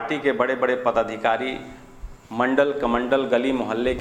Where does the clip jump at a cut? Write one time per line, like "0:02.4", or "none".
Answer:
none